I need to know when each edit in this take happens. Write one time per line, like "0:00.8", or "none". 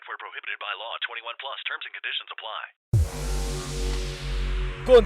0:02.9